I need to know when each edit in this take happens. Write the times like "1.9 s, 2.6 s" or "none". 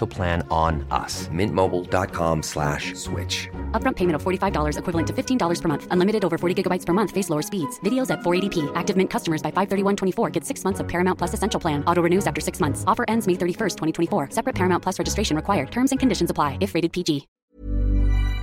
17.5 s

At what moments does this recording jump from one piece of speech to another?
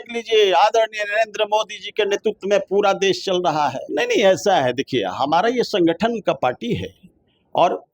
3.8 s

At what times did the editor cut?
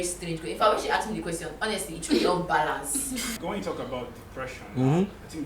3.3 s

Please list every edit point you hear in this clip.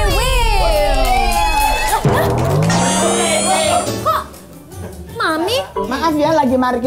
1.8 s, 3.8 s

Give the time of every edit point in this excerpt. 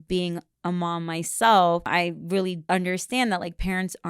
2.0 s

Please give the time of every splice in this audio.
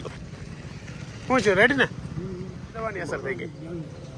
none

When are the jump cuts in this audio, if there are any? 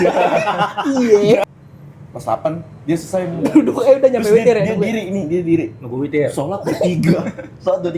1.4 s

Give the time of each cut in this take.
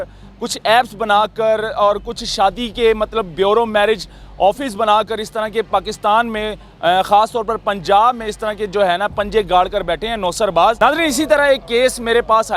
10.8 s

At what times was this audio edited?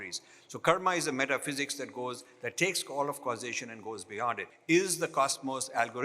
4.5 s

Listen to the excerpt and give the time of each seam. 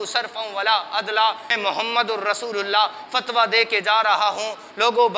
1.5 s

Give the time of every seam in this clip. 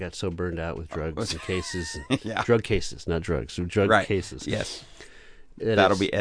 none

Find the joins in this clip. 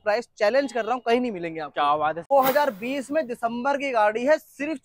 2.2 s

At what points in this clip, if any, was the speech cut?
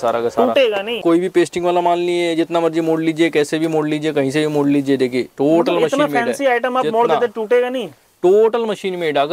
1.0 s

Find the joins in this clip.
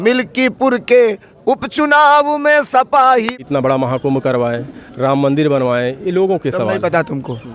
3.3 s

